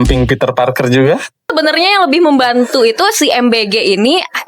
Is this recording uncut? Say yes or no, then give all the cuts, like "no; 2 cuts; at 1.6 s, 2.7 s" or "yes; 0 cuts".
no; 1 cut; at 1.5 s